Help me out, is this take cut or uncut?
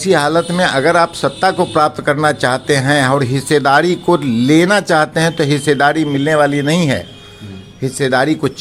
uncut